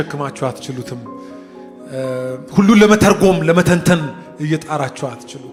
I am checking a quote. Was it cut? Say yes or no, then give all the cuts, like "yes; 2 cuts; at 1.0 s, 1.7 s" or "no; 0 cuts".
no; 0 cuts